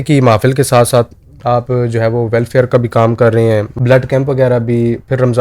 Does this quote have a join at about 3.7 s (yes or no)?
yes